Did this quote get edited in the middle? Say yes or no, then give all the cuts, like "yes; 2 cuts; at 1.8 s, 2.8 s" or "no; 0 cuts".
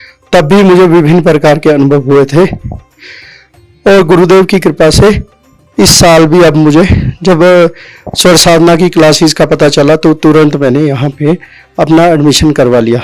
no; 0 cuts